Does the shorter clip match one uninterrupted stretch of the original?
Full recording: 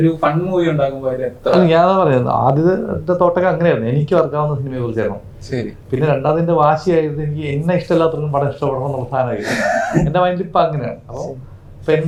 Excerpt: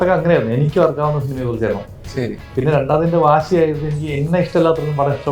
yes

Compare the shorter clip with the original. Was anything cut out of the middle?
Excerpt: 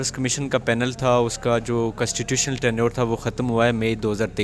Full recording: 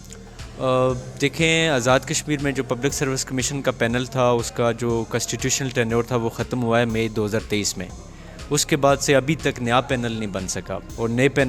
no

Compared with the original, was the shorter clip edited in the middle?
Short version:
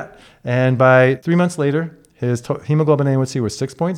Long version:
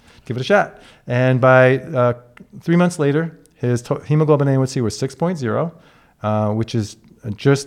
yes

